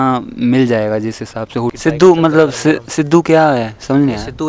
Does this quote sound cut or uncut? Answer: cut